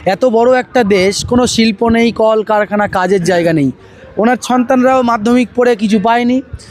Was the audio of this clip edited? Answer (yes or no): no